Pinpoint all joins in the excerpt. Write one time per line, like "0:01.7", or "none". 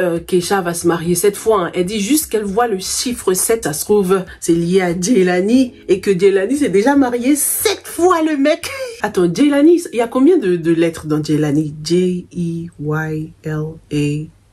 0:03.6
0:09.0